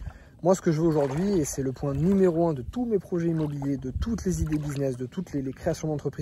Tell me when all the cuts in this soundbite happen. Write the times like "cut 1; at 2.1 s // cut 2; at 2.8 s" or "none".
none